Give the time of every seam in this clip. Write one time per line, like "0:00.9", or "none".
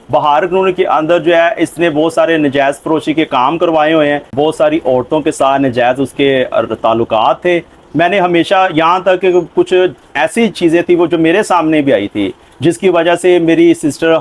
0:04.3